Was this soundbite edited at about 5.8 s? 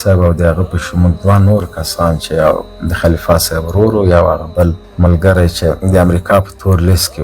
yes; 1 cut; at 5.8 s

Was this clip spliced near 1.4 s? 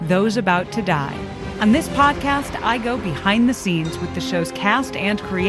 yes; 1 cut; at 1.4 s

